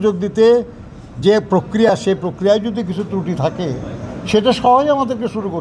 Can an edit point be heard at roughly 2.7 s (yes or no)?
no